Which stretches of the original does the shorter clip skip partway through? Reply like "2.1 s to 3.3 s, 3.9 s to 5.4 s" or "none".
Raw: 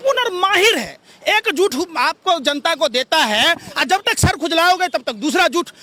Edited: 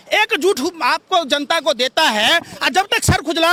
none